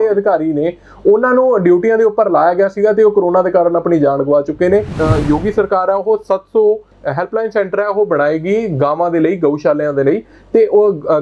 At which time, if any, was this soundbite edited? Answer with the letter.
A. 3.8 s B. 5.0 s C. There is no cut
B